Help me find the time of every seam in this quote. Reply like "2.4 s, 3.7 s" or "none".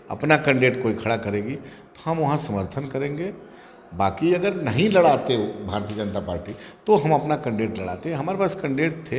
none